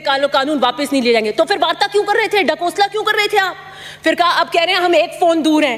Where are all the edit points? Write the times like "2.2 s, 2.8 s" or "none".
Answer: none